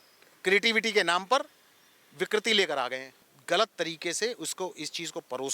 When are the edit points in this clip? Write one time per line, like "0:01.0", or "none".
0:03.3